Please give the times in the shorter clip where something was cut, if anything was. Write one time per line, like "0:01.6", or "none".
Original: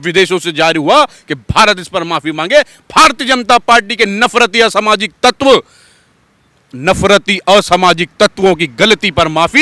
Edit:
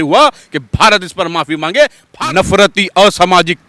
0:02.0